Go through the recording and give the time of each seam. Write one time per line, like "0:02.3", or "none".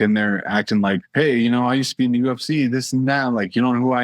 0:01.1